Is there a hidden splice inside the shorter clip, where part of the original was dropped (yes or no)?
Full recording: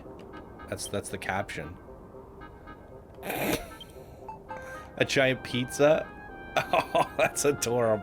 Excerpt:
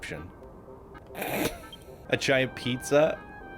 yes